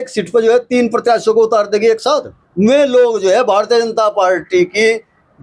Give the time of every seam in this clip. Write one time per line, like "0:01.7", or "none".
0:02.4